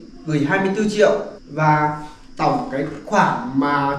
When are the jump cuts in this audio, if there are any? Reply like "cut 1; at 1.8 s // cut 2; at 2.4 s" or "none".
cut 1; at 1.4 s